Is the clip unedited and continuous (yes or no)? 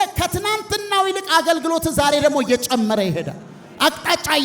yes